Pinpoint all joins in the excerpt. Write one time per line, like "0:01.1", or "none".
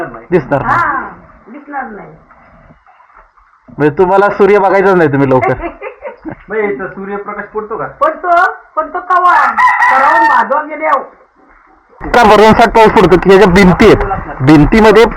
0:12.1

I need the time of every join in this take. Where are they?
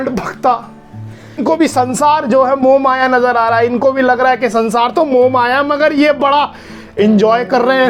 0:01.5

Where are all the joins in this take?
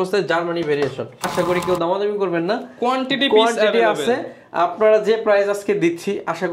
0:01.3

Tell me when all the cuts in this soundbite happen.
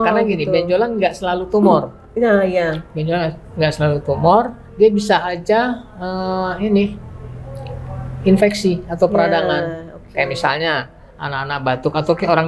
none

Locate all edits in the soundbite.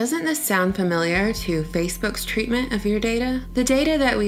none

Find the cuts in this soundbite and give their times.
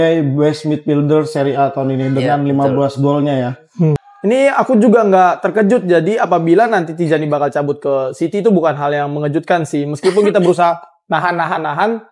0:04.1

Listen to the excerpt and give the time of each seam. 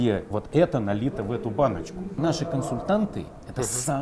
0:02.2

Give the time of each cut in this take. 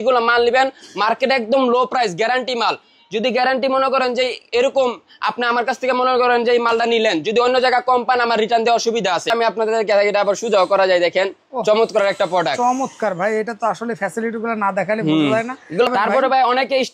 0:09.3
0:15.9

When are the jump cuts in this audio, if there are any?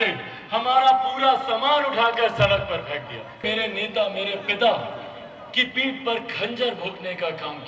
0:03.4

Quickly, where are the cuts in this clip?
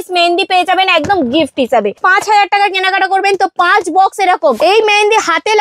0:02.0
0:04.6

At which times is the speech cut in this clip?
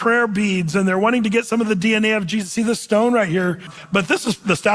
0:03.8

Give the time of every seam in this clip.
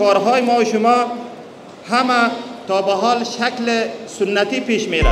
none

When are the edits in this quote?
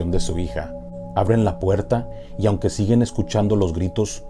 0:01.1

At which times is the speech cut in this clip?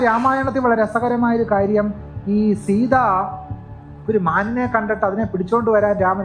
none

